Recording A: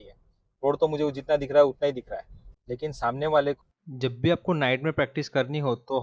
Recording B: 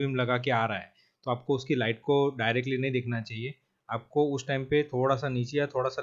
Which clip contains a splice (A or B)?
A